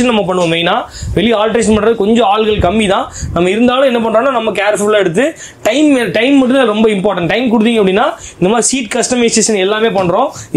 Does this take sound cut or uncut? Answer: uncut